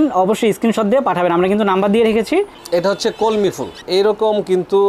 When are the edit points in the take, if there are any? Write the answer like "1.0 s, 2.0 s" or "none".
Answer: 2.6 s, 3.7 s